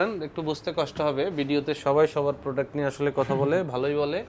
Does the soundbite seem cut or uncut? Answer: uncut